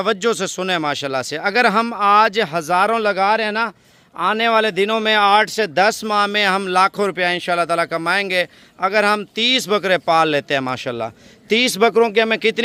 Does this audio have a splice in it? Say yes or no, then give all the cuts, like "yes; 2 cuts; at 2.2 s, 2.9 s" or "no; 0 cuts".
no; 0 cuts